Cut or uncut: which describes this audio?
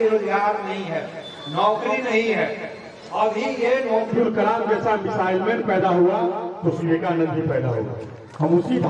cut